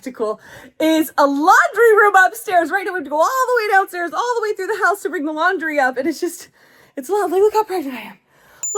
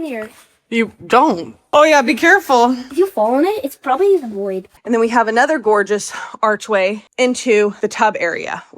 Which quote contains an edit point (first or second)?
second